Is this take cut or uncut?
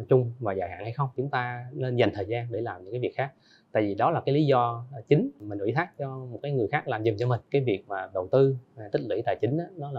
cut